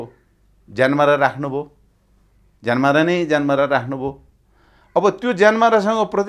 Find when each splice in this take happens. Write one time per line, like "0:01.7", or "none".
none